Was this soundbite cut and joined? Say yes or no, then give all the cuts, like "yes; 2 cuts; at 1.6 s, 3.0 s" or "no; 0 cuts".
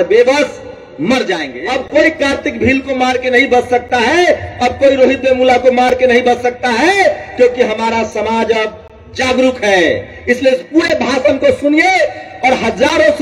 yes; 1 cut; at 1.5 s